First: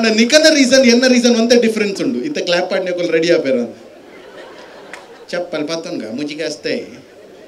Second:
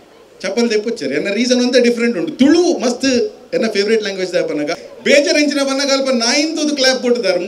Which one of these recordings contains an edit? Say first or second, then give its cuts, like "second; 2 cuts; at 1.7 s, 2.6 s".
second; 1 cut; at 4.8 s